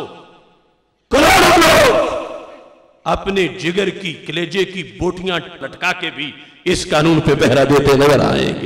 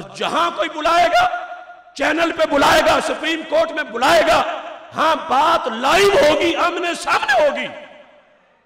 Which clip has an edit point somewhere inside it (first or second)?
first